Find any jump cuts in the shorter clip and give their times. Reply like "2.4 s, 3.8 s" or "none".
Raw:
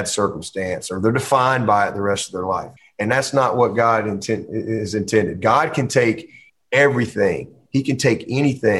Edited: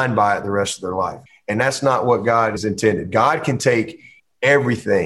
2.6 s